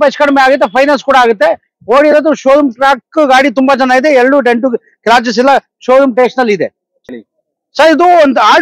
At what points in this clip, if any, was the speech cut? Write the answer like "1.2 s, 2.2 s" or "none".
7.1 s